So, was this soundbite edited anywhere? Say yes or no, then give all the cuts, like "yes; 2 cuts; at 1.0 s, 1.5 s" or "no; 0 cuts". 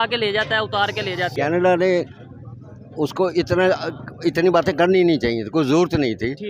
yes; 1 cut; at 1.3 s